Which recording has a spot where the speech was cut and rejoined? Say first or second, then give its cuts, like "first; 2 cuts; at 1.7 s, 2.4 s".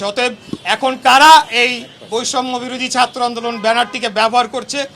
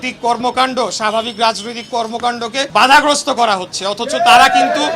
second; 1 cut; at 2.7 s